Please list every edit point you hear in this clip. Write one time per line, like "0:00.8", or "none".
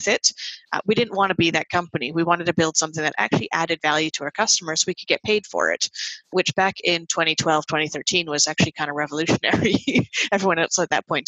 0:06.3